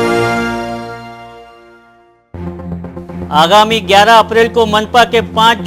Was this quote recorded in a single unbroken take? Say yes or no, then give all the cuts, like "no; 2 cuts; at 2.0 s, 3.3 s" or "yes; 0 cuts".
no; 1 cut; at 3.1 s